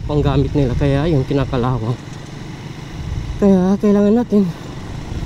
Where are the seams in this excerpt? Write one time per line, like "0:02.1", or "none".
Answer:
none